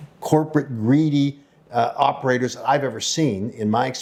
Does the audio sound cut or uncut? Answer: uncut